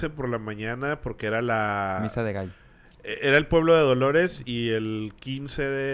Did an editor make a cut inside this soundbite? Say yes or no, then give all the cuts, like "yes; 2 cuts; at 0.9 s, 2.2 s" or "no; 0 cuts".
no; 0 cuts